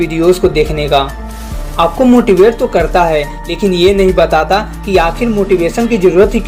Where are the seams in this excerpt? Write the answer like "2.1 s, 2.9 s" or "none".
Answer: none